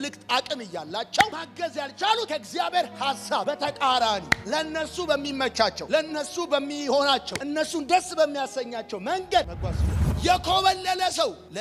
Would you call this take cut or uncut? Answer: cut